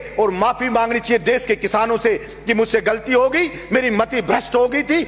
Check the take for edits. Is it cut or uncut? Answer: uncut